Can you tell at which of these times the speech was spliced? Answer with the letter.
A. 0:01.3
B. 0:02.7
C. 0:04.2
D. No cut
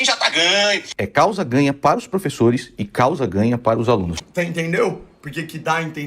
C